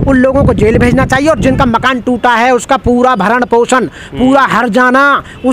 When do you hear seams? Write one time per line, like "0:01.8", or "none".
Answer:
none